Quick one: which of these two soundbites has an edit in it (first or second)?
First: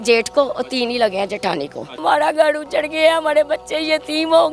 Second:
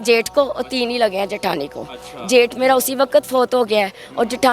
first